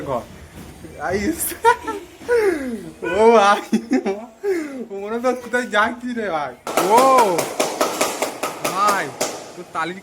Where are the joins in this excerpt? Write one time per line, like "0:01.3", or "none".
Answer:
0:06.7